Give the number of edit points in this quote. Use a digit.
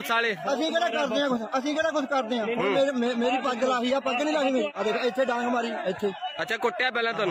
1